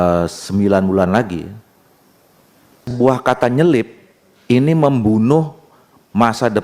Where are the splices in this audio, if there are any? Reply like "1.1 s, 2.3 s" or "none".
2.9 s